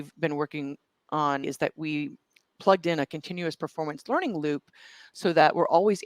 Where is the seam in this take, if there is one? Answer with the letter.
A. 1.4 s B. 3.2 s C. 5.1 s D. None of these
A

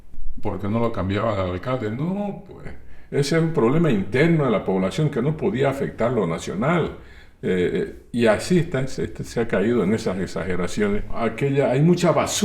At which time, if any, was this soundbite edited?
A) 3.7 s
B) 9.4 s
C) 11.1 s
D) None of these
C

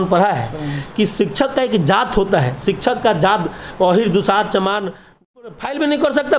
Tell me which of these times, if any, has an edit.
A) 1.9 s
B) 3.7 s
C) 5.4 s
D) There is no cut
C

